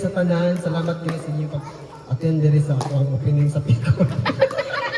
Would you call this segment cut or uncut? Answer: uncut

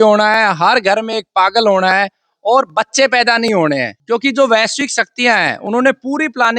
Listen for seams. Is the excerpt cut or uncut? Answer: cut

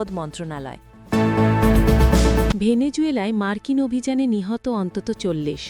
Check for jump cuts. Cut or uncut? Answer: cut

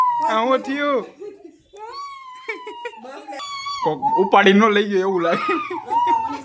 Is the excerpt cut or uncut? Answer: cut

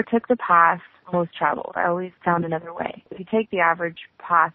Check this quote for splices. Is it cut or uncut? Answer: cut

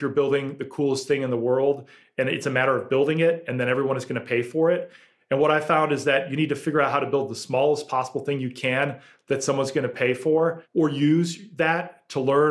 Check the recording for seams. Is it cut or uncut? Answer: cut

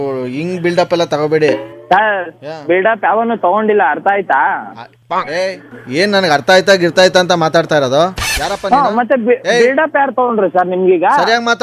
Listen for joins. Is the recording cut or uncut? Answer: uncut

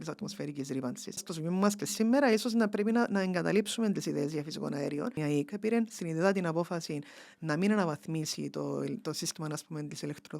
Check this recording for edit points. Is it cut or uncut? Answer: cut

